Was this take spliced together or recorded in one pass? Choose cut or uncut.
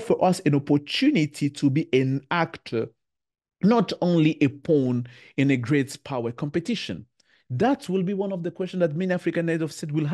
uncut